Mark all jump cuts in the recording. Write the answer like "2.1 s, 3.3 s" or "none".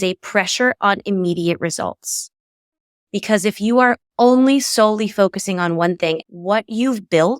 6.2 s